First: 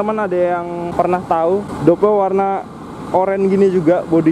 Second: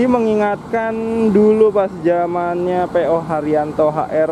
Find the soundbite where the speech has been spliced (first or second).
first